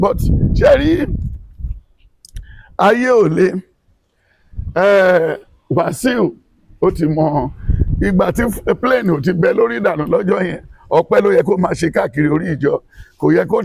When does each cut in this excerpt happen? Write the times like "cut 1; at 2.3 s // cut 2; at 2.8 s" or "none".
none